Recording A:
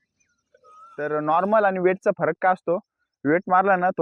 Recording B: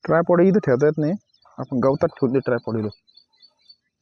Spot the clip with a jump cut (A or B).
A